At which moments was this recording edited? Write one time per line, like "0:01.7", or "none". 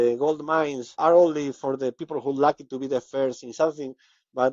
0:00.9